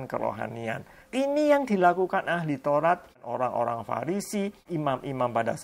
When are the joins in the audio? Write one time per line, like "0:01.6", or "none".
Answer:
0:00.9
0:03.3
0:04.7